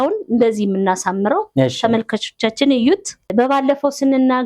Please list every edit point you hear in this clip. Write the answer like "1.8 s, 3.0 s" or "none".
3.3 s